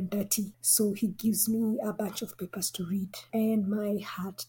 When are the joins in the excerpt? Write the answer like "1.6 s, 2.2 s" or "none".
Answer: none